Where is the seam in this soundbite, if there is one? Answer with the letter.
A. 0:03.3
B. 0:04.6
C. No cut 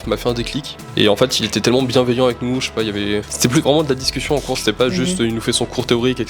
A